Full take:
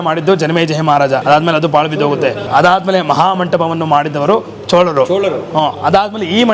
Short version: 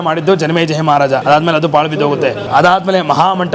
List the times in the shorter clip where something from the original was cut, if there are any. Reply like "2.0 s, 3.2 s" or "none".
none